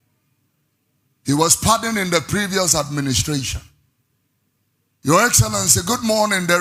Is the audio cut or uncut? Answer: uncut